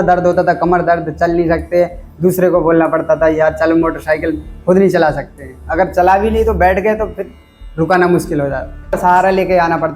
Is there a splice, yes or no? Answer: yes